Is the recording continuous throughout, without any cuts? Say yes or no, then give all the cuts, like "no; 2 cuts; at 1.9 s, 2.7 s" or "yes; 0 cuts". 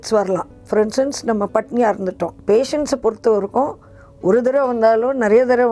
no; 1 cut; at 2.4 s